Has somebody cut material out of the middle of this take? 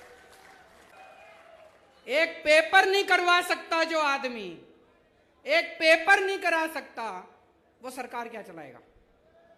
yes; 1 cut; at 0.9 s

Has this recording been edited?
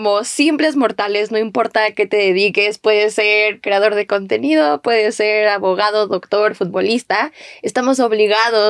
no; 0 cuts

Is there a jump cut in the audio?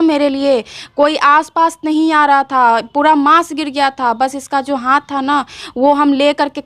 no; 0 cuts

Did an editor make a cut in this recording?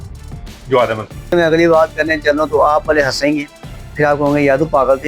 yes; 1 cut; at 1.3 s

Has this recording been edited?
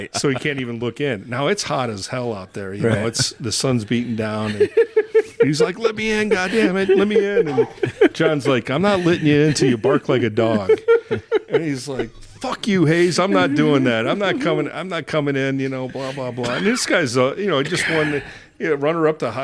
no; 0 cuts

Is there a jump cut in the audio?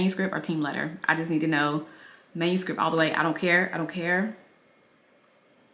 no; 0 cuts

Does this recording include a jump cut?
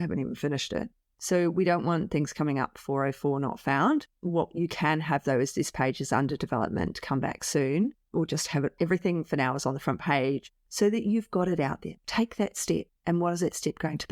yes; 2 cuts; at 10.4 s, 12.0 s

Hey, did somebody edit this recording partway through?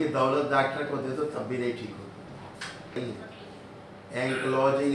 yes; 1 cut; at 3.0 s

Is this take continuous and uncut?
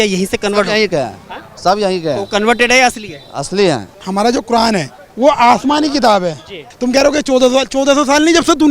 no; 3 cuts; at 3.9 s, 5.0 s, 6.7 s

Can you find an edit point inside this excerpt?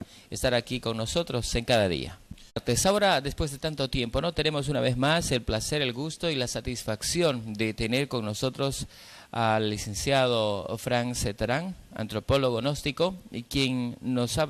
no; 0 cuts

